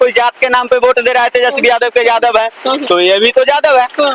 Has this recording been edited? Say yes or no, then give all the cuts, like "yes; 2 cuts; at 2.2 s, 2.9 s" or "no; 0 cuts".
no; 0 cuts